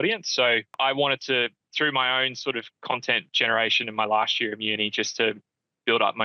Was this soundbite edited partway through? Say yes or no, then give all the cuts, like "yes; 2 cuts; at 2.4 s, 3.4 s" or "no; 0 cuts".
yes; 3 cuts; at 0.8 s, 1.6 s, 2.7 s